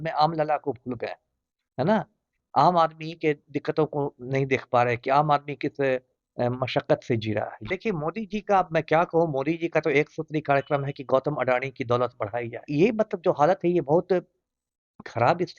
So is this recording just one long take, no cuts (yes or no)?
no